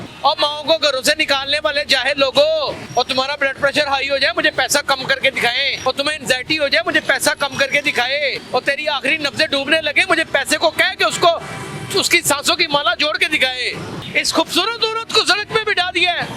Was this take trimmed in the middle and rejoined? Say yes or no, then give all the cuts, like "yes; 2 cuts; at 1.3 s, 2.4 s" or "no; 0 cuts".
yes; 4 cuts; at 2.8 s, 5.8 s, 8.4 s, 14.0 s